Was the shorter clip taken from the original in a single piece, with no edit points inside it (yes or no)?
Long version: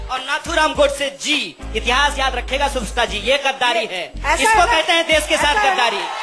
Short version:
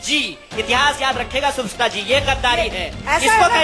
yes